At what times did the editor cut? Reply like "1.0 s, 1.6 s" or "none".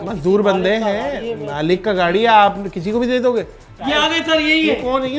3.6 s